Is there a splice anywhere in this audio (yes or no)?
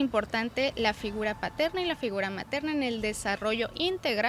no